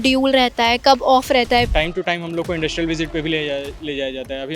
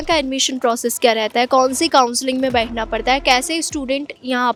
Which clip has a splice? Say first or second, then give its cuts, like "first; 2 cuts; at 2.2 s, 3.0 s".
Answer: first; 1 cut; at 1.7 s